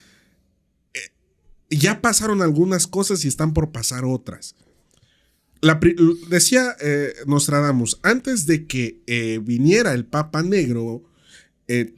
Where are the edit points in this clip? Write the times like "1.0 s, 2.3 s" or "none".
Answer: none